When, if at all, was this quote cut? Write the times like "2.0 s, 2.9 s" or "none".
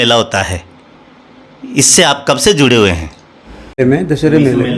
3.8 s